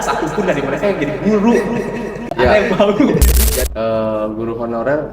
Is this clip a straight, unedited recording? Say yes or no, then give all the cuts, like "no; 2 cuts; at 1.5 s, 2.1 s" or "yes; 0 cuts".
no; 1 cut; at 3.4 s